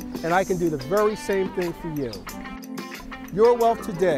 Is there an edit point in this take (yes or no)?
yes